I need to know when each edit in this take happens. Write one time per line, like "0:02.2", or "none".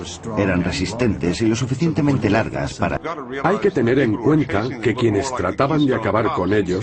none